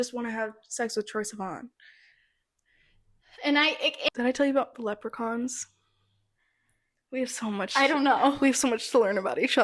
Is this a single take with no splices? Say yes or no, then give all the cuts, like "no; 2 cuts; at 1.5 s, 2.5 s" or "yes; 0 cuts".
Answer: no; 1 cut; at 4.1 s